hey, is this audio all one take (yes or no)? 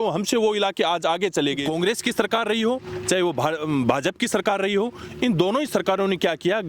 no